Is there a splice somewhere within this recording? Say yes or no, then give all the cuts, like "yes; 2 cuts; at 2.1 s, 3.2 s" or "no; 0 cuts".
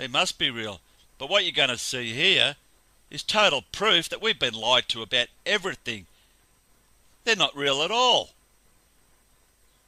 no; 0 cuts